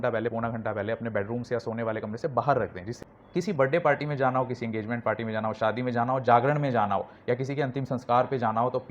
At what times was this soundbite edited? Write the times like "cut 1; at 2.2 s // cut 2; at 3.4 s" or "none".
cut 1; at 2.9 s